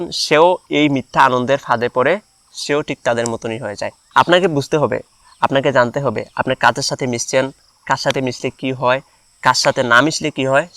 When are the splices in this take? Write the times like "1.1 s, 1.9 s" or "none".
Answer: 3.9 s